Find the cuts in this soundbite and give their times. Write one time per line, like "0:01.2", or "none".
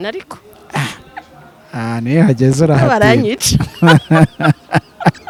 none